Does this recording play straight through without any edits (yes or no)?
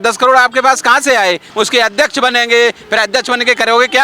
no